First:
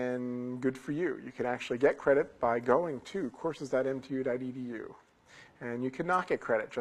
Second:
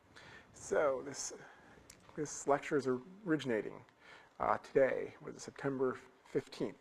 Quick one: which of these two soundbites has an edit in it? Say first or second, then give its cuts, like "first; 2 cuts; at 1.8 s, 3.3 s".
second; 1 cut; at 2.3 s